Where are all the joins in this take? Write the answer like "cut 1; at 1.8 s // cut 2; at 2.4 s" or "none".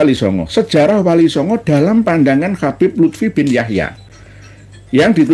none